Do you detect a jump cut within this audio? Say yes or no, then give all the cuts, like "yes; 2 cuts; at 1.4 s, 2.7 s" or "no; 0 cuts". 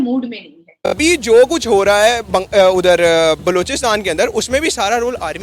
yes; 1 cut; at 1.0 s